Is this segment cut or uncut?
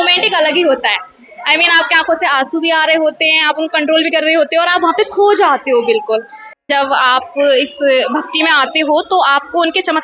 cut